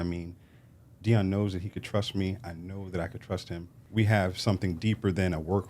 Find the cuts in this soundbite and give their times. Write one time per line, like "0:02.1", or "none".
0:03.8